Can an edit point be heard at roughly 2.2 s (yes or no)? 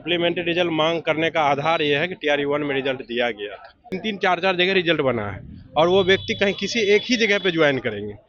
no